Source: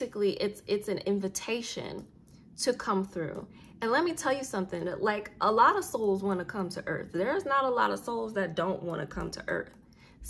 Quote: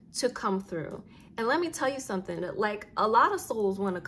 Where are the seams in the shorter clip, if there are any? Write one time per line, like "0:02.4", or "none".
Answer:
none